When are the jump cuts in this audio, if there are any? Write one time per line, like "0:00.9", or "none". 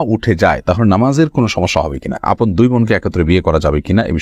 0:02.2